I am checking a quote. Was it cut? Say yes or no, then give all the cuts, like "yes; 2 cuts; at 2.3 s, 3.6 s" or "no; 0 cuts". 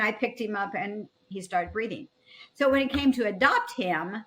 yes; 1 cut; at 1.3 s